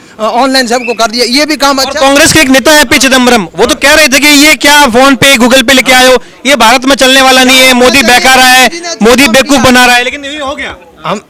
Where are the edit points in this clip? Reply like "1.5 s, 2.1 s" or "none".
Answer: none